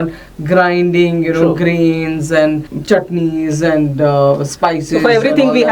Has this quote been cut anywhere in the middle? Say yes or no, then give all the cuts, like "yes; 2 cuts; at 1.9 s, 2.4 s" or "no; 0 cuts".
yes; 1 cut; at 2.7 s